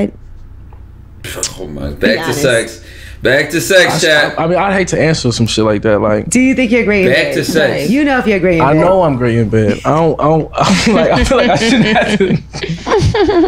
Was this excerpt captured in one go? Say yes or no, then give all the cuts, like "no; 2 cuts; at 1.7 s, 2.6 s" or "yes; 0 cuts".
yes; 0 cuts